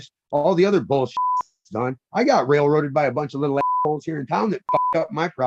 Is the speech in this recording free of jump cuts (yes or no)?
yes